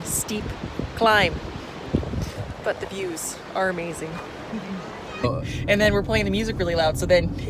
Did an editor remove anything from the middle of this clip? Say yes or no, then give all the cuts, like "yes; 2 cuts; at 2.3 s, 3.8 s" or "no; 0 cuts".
yes; 1 cut; at 5.2 s